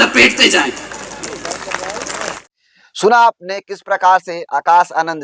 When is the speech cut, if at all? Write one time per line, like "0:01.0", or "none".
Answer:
none